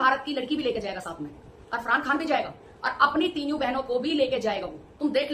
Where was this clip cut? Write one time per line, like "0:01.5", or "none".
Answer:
none